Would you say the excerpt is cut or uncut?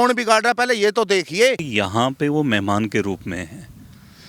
cut